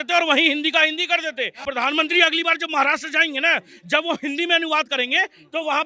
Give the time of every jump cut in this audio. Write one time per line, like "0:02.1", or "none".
0:01.6